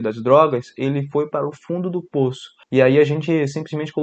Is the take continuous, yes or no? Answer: no